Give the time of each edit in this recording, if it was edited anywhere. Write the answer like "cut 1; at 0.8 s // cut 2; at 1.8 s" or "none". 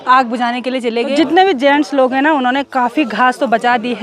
cut 1; at 1.2 s